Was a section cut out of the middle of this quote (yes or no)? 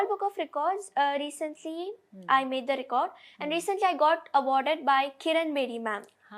no